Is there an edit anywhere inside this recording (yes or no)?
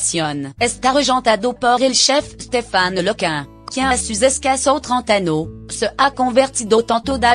yes